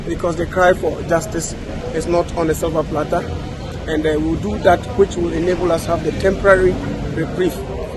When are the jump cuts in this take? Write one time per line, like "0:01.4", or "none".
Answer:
none

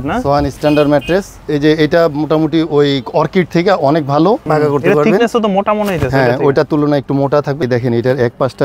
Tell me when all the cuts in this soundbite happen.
0:01.4
0:04.4
0:07.6

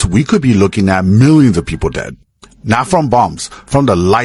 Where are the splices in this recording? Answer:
none

